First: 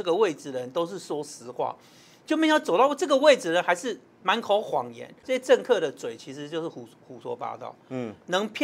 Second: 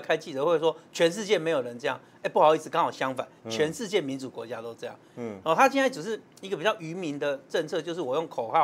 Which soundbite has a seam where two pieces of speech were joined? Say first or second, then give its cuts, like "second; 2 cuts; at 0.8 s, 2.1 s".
first; 1 cut; at 5.2 s